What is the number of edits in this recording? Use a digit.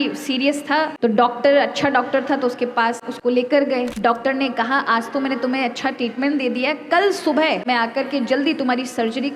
4